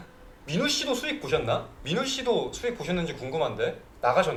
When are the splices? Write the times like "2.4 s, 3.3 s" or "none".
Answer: none